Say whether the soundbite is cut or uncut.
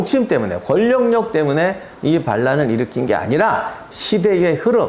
uncut